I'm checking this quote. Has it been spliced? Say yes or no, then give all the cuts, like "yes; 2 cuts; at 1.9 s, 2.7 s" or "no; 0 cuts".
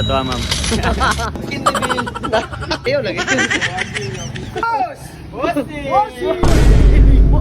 yes; 3 cuts; at 1.4 s, 2.9 s, 4.6 s